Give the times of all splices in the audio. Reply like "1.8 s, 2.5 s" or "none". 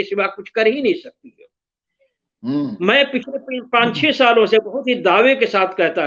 none